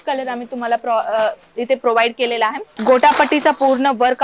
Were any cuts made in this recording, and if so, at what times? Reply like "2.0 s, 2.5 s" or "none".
2.7 s

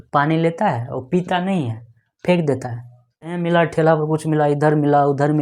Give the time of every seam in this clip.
3.4 s

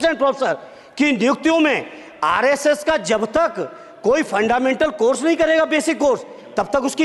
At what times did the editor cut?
none

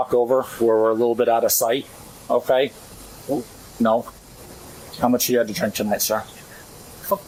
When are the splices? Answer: none

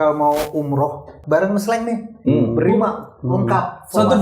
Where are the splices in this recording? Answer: 1.1 s

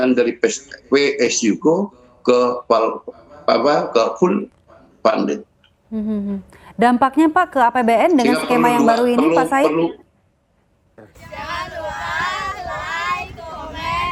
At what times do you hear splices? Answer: none

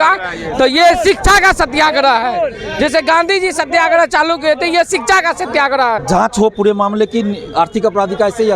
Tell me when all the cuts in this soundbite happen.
6.0 s

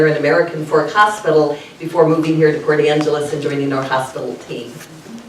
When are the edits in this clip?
2.5 s

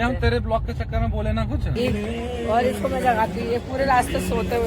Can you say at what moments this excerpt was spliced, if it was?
1.7 s

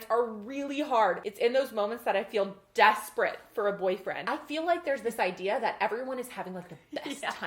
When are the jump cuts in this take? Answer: 1.3 s, 4.2 s

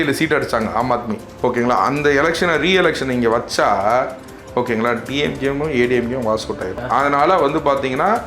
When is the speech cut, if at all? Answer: 1.2 s, 6.8 s

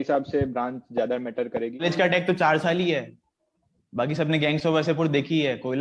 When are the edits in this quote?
1.8 s

